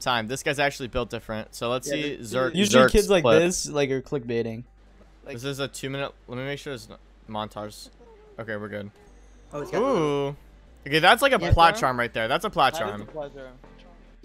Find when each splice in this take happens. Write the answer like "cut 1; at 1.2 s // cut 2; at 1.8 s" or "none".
none

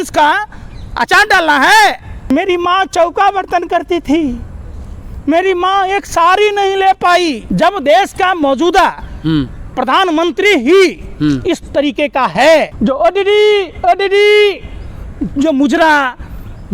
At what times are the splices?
cut 1; at 2.1 s // cut 2; at 7.4 s // cut 3; at 12.7 s

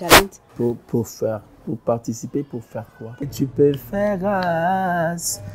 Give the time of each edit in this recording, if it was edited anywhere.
cut 1; at 3.3 s

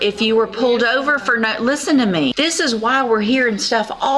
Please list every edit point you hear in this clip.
cut 1; at 2.3 s

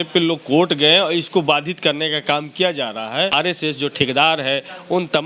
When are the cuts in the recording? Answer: cut 1; at 3.3 s

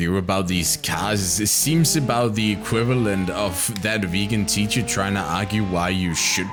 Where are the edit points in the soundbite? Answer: none

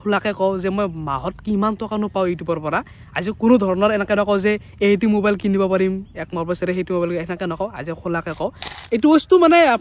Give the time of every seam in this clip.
cut 1; at 8.7 s

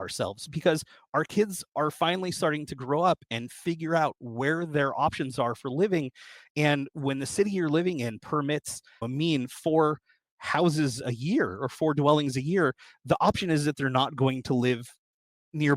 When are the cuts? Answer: cut 1; at 9.0 s

